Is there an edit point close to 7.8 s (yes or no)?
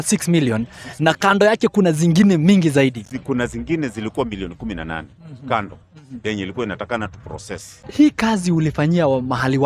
yes